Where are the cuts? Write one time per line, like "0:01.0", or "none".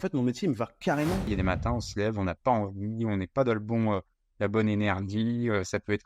0:01.3